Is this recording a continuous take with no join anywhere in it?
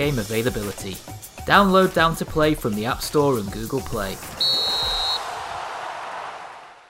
yes; 0 cuts

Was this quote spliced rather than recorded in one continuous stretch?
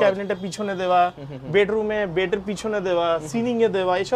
no; 0 cuts

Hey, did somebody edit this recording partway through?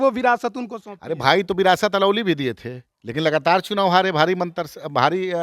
no; 0 cuts

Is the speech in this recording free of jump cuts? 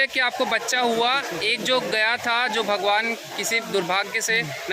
yes; 0 cuts

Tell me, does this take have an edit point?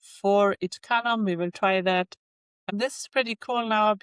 yes; 1 cut; at 2.7 s

